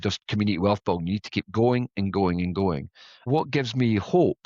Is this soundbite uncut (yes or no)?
no